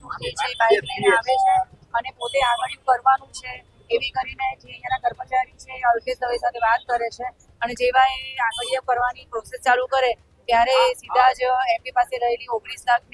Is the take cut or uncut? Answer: uncut